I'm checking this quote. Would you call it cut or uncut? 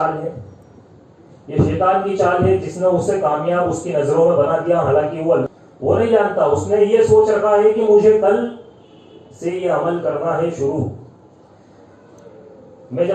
cut